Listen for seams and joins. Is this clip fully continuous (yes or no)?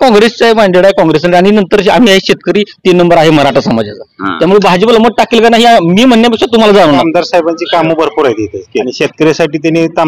no